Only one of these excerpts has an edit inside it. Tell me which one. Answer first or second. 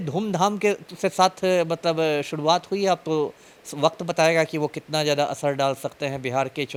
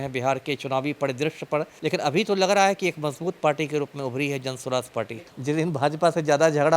second